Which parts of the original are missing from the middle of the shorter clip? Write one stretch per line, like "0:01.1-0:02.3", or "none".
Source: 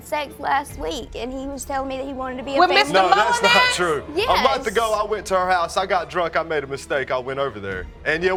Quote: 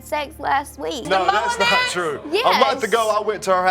0:01.0-0:02.9